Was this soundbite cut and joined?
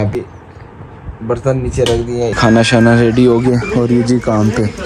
yes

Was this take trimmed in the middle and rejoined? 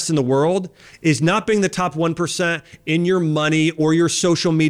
no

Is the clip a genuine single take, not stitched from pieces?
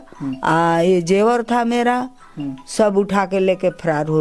yes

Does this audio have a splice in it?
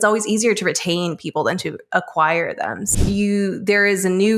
yes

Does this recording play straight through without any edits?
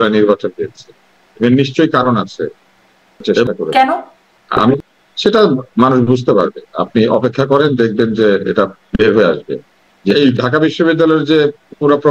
no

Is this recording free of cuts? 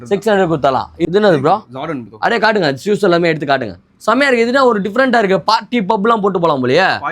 no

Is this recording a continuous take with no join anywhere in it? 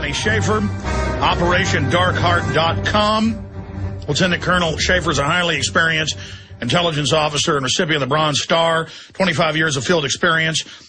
no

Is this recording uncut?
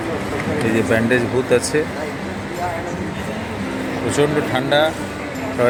yes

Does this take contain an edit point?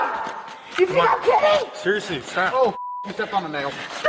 no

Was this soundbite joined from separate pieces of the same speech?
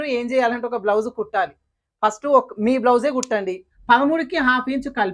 yes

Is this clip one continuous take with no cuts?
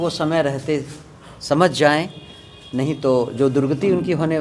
yes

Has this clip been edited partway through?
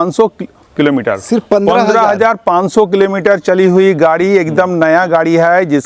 no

